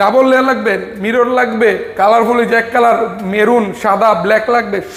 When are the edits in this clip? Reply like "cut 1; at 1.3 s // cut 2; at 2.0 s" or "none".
none